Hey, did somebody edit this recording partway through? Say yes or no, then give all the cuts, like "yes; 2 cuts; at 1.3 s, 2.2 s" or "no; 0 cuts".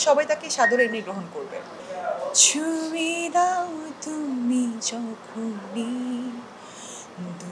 yes; 1 cut; at 1.8 s